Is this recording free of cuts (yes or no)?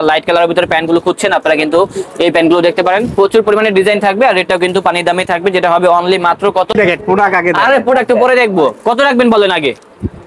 no